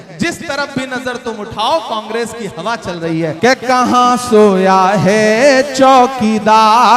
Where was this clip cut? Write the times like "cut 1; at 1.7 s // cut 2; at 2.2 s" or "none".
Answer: cut 1; at 3.3 s